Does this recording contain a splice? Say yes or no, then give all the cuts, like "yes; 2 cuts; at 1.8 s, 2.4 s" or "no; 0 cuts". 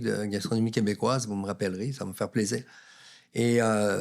no; 0 cuts